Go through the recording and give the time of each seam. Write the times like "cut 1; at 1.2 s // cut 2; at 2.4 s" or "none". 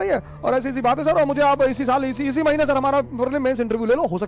none